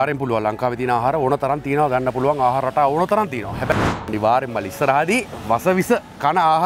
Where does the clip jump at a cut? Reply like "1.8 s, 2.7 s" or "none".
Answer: 4.1 s